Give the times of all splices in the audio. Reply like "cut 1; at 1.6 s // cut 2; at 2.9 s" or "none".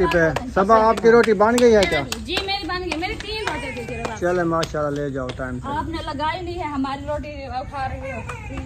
none